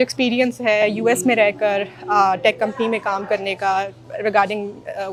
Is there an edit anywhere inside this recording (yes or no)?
no